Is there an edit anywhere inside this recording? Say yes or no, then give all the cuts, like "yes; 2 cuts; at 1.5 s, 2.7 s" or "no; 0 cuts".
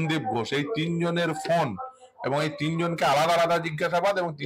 no; 0 cuts